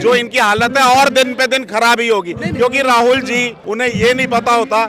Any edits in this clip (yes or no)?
yes